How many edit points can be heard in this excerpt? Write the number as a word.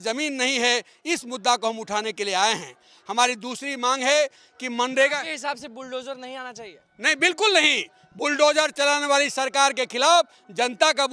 zero